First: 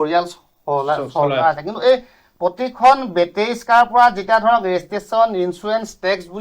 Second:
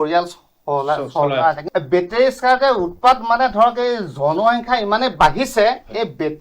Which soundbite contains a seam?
second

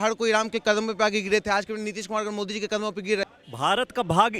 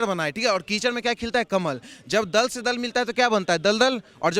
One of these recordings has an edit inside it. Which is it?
first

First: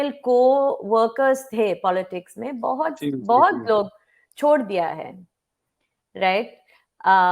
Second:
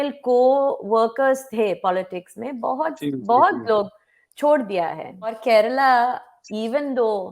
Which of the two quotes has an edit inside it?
second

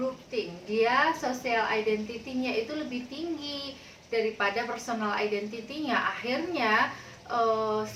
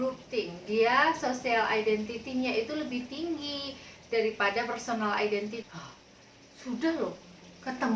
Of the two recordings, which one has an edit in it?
second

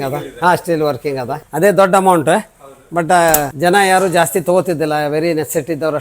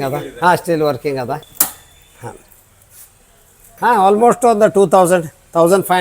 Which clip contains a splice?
first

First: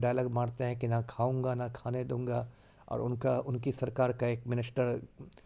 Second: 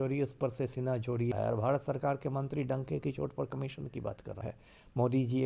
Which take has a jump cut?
second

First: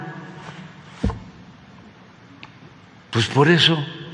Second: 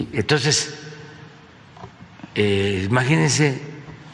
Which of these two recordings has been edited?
second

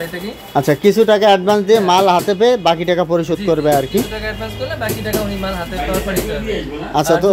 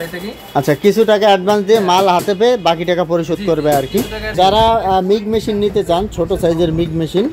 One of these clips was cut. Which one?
second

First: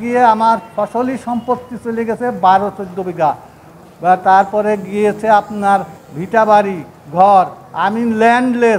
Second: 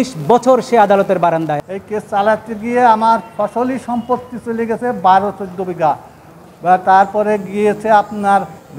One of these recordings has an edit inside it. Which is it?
second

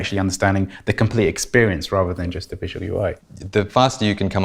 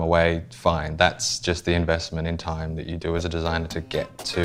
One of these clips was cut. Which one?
first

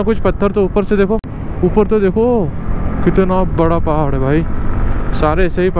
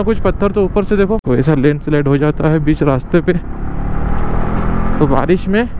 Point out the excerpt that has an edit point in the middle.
second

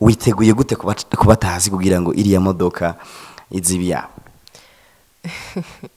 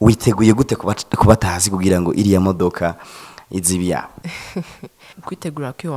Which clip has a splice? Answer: second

